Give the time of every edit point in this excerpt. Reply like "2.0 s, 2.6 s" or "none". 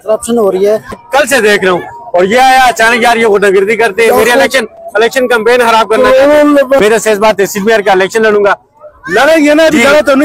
1.0 s, 6.8 s